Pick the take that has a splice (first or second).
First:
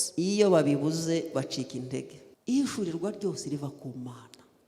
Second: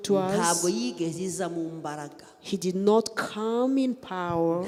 first